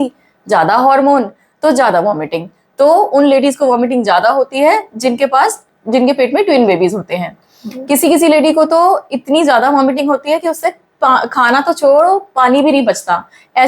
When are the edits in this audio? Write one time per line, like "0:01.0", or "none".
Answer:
none